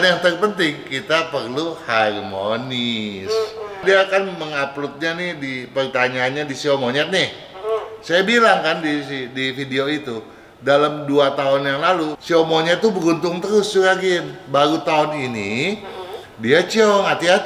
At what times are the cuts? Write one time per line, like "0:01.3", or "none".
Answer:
0:03.8
0:12.1

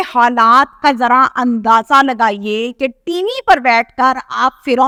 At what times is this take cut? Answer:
none

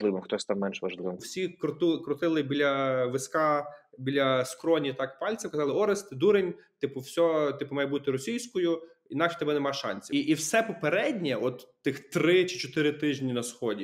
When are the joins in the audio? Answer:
0:01.2
0:10.1

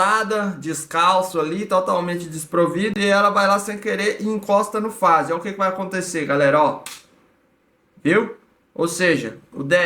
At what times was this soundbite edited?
none

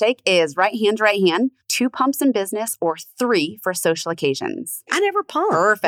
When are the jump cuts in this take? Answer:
0:01.6
0:04.9

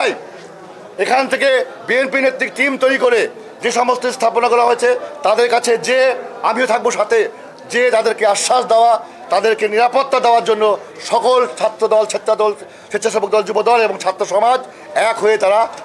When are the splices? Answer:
none

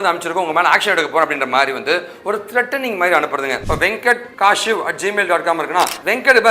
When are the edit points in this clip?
0:03.6

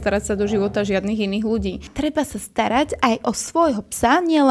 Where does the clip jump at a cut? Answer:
0:01.9

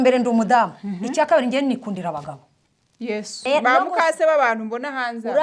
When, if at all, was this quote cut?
0:03.4

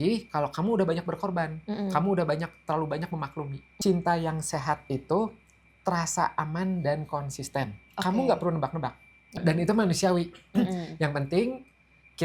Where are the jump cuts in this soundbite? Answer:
0:03.6
0:09.4

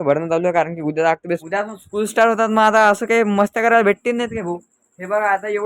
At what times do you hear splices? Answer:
0:01.4

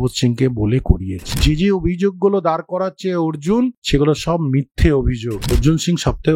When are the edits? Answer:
0:01.3
0:03.8
0:05.5

